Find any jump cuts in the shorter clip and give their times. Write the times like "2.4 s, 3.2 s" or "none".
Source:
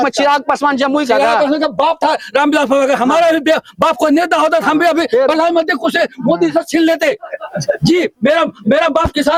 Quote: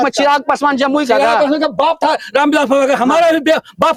none